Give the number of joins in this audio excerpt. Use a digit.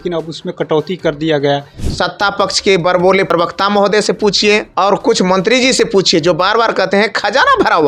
3